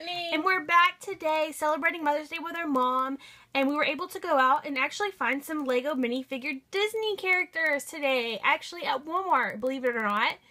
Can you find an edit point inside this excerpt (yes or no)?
no